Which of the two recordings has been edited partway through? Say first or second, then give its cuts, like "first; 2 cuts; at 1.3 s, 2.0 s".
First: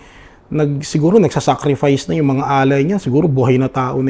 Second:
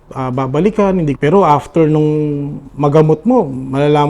second; 1 cut; at 1.2 s